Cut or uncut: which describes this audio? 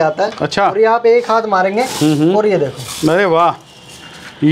uncut